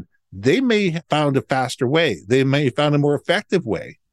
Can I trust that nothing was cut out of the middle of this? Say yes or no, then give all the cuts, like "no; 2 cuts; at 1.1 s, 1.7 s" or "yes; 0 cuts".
no; 1 cut; at 1.0 s